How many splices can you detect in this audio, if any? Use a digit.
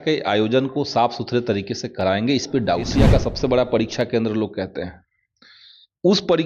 1